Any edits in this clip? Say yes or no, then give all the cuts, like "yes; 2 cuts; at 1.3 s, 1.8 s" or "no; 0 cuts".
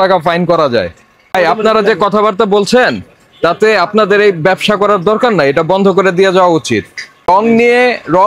yes; 2 cuts; at 1.3 s, 7.3 s